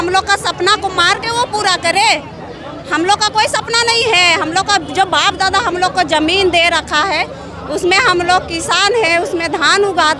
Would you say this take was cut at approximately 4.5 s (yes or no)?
no